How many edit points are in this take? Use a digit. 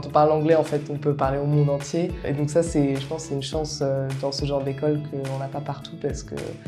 1